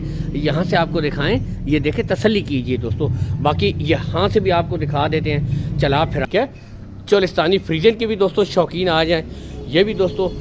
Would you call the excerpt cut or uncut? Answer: cut